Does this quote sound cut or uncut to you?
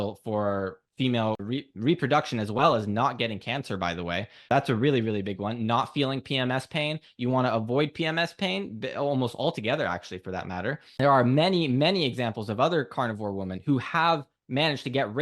cut